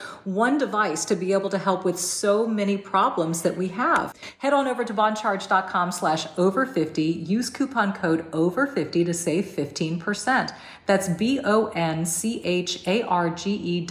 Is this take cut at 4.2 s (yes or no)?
yes